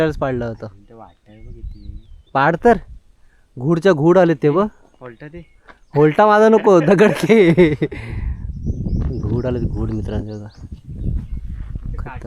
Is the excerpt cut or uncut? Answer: uncut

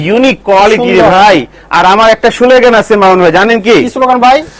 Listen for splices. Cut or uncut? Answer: uncut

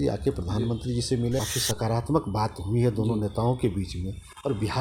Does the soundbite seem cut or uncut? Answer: cut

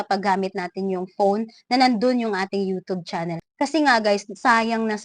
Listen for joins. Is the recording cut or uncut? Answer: uncut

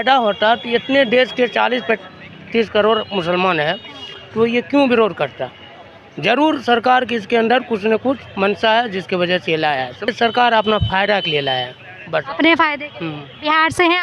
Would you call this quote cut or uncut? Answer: uncut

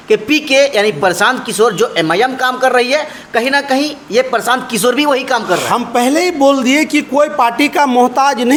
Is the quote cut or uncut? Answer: uncut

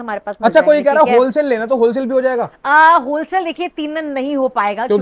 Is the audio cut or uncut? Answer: uncut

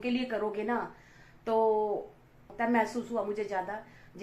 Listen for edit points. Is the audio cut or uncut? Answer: cut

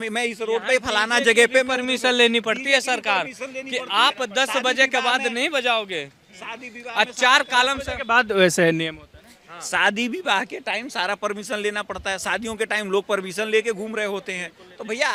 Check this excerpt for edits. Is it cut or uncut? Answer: uncut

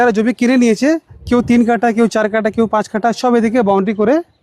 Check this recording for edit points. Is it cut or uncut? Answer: uncut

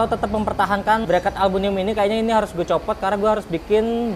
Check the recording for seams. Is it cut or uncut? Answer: cut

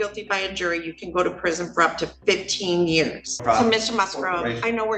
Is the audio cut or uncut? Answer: cut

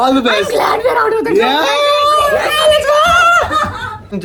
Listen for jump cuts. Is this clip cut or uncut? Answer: uncut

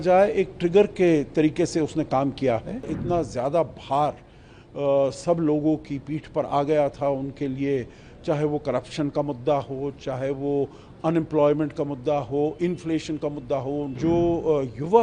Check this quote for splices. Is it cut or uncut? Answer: cut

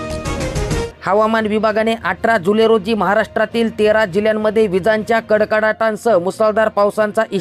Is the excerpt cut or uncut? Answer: cut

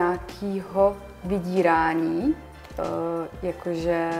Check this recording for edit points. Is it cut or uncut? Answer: uncut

